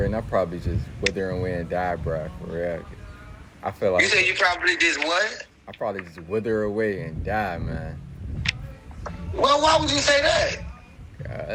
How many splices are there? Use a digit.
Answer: 0